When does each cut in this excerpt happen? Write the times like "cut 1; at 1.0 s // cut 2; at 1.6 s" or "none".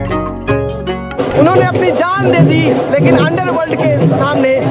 cut 1; at 1.2 s

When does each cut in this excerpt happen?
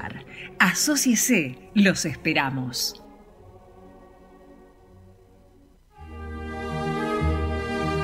none

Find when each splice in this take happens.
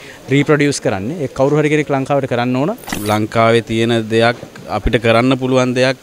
cut 1; at 2.9 s

